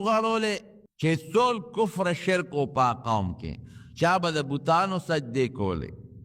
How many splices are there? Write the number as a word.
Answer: one